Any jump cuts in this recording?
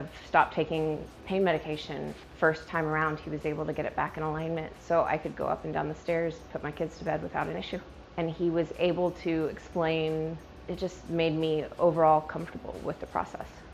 yes; 4 cuts; at 1.1 s, 2.1 s, 8.0 s, 10.5 s

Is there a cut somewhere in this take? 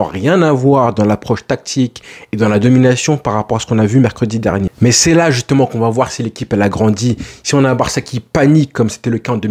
yes; 1 cut; at 4.7 s

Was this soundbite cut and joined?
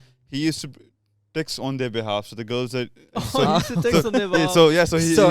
no; 0 cuts

